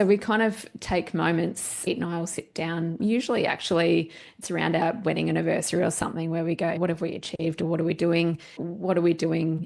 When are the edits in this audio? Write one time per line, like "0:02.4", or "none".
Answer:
0:01.7
0:06.8
0:08.6